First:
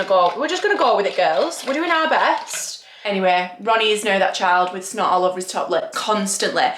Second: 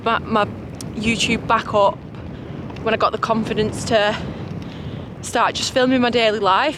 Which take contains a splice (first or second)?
first